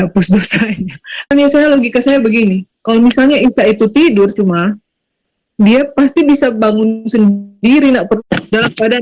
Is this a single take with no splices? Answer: no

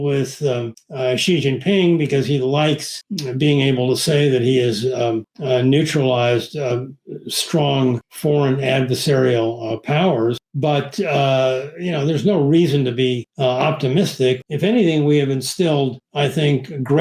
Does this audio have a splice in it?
yes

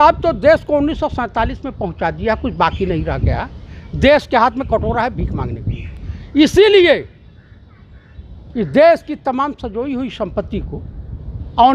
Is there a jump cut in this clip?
no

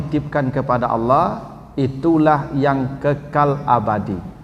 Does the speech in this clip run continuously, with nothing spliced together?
yes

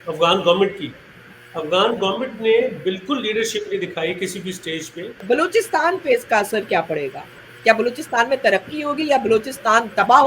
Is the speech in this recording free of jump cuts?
no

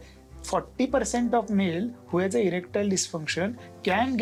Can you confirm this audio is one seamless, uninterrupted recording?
yes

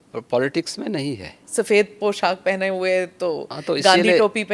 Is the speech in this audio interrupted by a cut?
yes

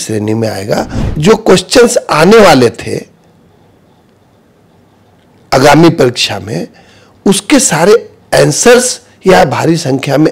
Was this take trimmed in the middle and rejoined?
yes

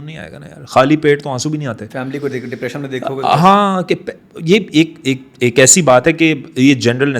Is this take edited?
no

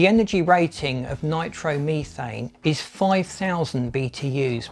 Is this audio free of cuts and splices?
yes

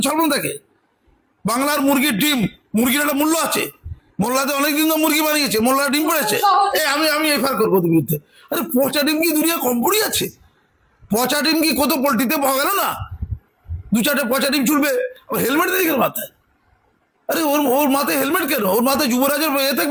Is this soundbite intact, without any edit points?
yes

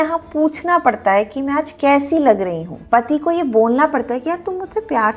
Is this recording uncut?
yes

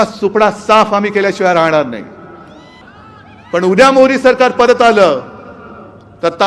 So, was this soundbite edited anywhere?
yes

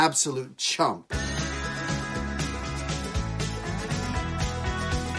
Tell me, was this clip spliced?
yes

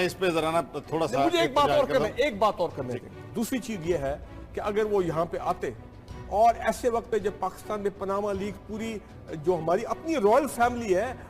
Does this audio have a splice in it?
yes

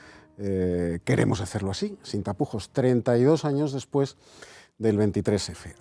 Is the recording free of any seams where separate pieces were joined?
no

